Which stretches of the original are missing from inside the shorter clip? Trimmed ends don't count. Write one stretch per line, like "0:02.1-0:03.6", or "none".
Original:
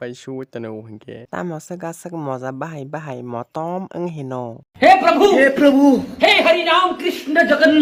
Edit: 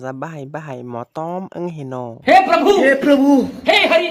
0:04.5-0:04.7